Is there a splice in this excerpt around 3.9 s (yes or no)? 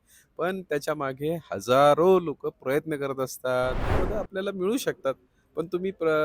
yes